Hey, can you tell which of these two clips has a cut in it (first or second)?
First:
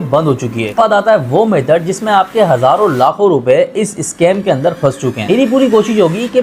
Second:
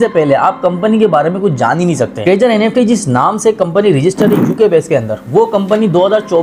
first